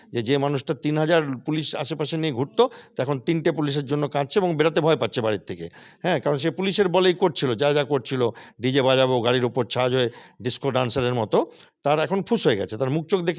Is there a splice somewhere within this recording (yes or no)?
no